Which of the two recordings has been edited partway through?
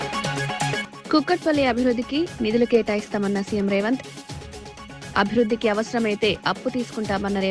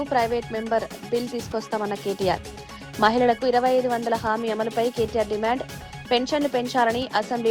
first; 1 cut; at 0.9 s

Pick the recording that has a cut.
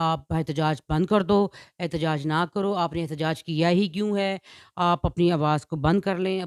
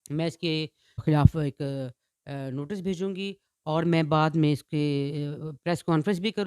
second; 1 cut; at 1.0 s

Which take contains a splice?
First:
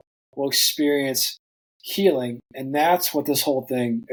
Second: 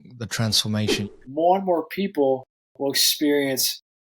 second; 1 cut; at 1.0 s

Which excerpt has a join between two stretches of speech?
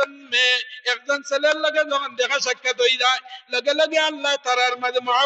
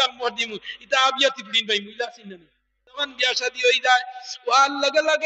second; 1 cut; at 3.1 s

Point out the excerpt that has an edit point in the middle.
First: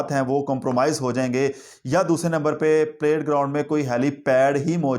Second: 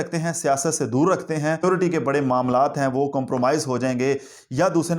second; 1 cut; at 1.6 s

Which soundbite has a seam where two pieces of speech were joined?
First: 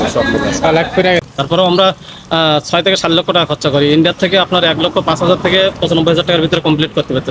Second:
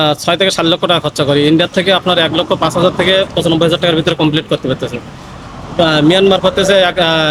first; 1 cut; at 1.2 s

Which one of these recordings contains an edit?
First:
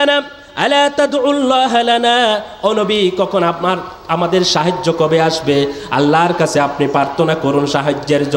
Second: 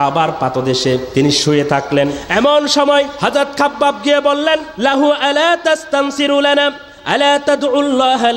second; 4 cuts; at 1.1 s, 2.2 s, 3.1 s, 4.7 s

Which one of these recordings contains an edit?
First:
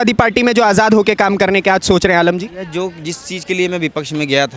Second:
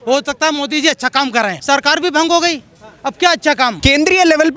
second; 2 cuts; at 1.6 s, 3.8 s

